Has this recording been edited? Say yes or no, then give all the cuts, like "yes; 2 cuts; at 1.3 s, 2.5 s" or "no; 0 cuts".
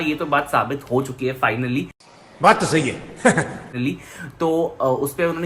no; 0 cuts